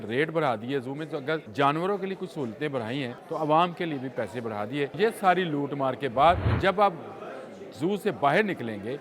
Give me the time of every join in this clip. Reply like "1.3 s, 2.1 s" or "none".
1.5 s, 3.2 s, 4.9 s, 6.5 s